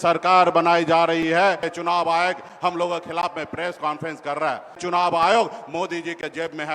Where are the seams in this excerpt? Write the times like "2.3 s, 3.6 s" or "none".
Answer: 1.7 s, 4.8 s